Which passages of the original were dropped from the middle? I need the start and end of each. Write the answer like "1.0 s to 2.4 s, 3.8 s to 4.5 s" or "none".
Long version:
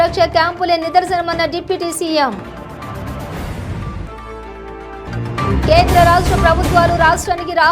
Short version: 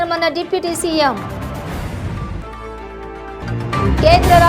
2.4 s to 2.9 s